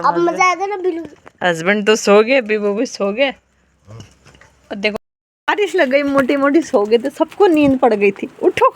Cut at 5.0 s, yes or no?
yes